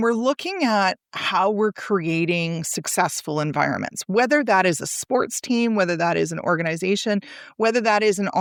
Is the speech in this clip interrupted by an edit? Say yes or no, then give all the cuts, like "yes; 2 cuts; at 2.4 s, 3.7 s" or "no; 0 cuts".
no; 0 cuts